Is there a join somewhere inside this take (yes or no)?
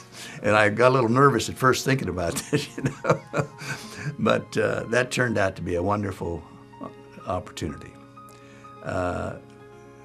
no